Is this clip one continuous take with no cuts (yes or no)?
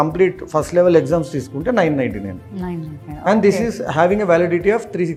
yes